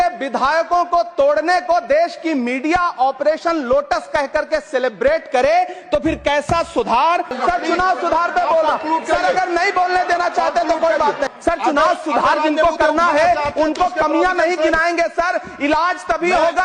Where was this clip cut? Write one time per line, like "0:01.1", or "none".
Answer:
0:07.4
0:11.3